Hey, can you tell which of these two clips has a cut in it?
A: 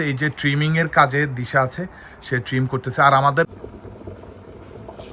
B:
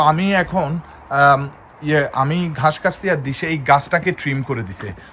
A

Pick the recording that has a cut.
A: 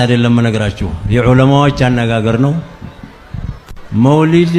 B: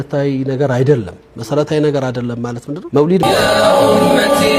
B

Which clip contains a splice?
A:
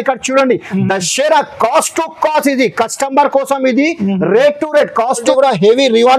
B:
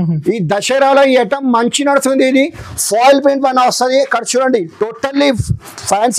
A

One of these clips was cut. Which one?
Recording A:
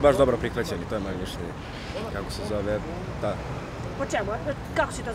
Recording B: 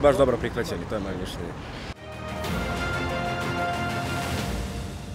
B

